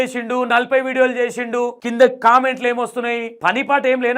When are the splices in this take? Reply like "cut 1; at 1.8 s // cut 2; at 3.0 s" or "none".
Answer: cut 1; at 1.8 s // cut 2; at 3.3 s